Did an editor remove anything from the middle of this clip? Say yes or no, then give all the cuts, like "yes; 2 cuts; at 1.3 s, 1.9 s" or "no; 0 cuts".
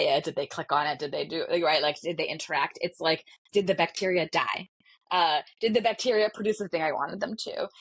no; 0 cuts